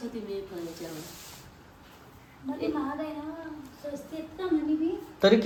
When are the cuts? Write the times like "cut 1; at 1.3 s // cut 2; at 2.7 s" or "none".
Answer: none